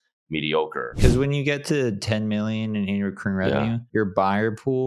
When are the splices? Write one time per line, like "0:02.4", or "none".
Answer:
0:00.9
0:03.8